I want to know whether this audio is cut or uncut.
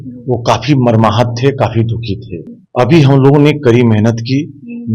cut